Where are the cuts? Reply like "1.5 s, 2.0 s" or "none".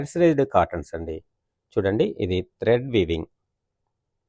none